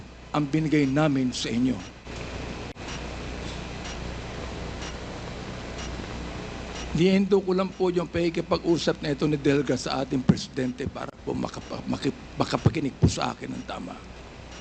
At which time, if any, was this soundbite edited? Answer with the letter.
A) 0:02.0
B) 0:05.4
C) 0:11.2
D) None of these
A